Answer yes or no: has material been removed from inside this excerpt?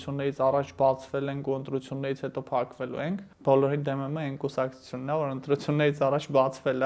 yes